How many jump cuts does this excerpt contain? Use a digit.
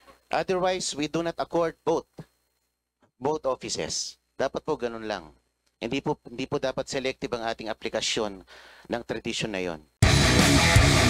1